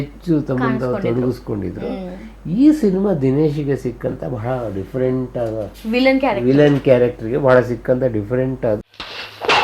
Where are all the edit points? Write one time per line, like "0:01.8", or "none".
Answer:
none